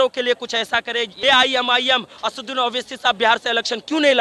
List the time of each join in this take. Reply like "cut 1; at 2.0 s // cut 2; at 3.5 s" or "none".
cut 1; at 1.1 s